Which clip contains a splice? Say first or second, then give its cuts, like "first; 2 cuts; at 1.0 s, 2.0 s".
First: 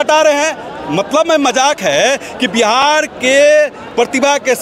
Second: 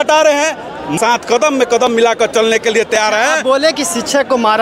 second; 1 cut; at 1.0 s